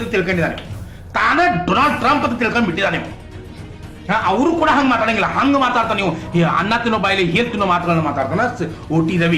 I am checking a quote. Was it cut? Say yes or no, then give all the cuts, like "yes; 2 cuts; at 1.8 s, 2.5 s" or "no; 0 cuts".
no; 0 cuts